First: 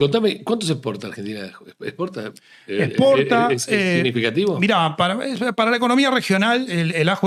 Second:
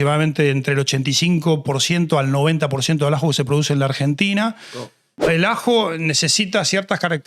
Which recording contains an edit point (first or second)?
second